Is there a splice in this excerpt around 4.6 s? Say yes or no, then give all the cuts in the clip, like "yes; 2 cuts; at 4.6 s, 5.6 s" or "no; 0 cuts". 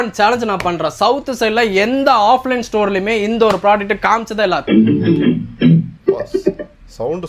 yes; 2 cuts; at 4.6 s, 5.9 s